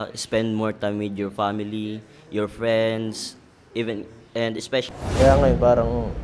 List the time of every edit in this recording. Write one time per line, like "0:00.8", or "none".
0:04.9